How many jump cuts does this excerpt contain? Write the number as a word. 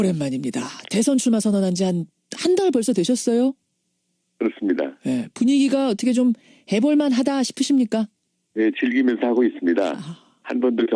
one